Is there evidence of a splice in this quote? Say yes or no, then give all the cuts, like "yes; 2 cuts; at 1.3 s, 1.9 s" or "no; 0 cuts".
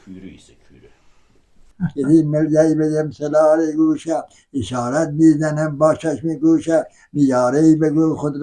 yes; 1 cut; at 1.7 s